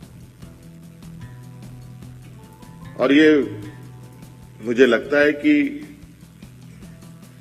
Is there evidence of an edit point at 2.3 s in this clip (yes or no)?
yes